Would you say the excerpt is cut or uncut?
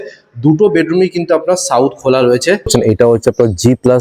cut